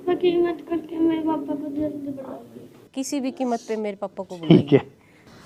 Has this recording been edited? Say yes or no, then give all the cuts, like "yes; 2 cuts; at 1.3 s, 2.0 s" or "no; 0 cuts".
no; 0 cuts